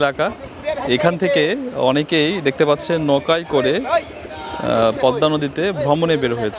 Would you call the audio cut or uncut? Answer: uncut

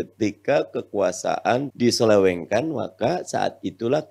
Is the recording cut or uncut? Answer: cut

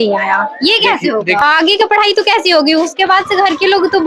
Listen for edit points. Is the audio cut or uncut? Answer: cut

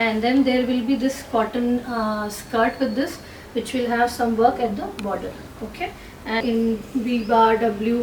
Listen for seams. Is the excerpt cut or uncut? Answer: cut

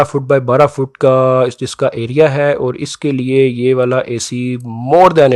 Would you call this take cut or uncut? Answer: uncut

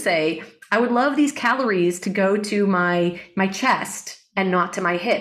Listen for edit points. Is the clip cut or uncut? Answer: uncut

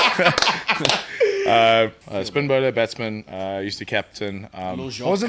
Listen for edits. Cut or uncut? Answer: cut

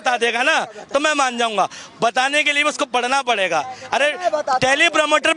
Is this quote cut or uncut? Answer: uncut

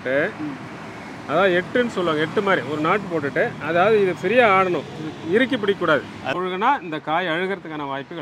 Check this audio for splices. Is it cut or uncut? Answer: cut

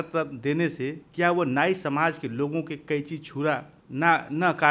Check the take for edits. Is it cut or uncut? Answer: cut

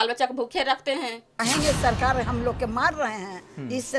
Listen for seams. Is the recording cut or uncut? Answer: cut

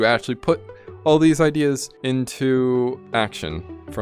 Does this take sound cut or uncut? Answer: cut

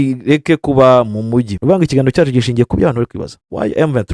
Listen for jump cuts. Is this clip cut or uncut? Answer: cut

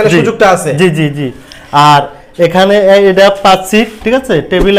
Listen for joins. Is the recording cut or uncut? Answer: uncut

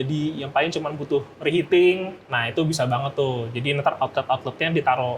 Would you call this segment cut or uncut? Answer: cut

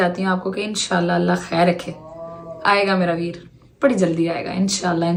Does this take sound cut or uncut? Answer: uncut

